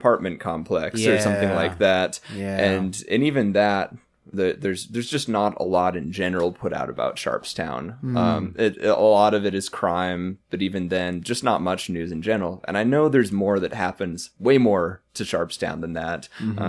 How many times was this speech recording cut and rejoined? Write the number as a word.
zero